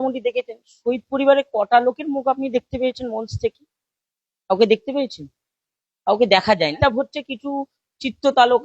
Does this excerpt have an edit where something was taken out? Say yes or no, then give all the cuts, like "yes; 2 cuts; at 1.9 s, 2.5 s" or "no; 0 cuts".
yes; 1 cut; at 6.8 s